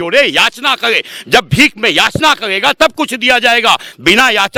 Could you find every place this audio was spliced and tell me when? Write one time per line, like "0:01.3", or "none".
none